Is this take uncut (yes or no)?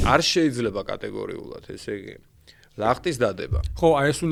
yes